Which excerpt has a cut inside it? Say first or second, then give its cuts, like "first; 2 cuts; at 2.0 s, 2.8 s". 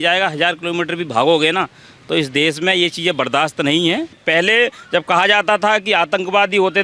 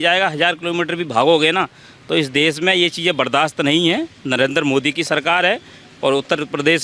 first; 1 cut; at 4.2 s